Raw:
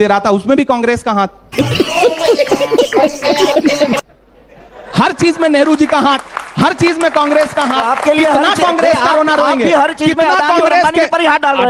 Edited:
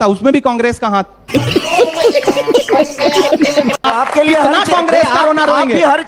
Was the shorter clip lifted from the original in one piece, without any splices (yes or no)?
no